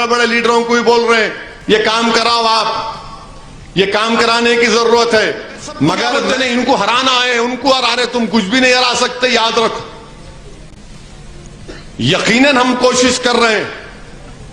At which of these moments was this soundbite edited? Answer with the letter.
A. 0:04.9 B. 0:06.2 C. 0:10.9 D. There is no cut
B